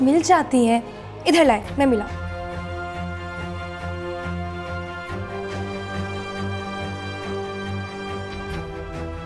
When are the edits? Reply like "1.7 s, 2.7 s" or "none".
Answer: none